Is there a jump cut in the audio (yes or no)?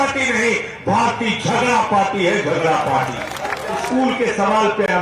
yes